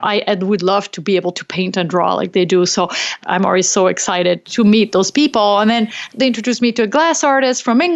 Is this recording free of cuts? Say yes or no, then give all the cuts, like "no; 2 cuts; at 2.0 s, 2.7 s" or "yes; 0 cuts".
no; 3 cuts; at 3.2 s, 4.4 s, 6.1 s